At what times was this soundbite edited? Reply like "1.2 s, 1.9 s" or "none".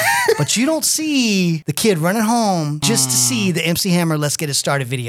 1.7 s, 2.8 s